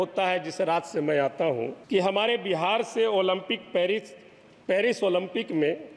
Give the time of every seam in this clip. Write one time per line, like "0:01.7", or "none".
0:01.8